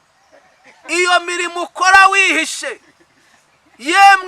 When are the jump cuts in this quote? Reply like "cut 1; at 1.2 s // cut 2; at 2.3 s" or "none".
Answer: none